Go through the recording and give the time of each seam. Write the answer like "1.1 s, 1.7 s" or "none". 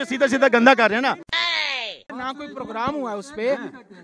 2.1 s

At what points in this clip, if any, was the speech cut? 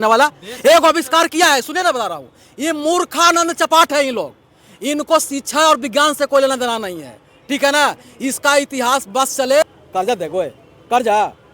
9.6 s

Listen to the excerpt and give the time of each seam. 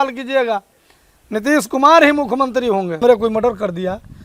3.0 s

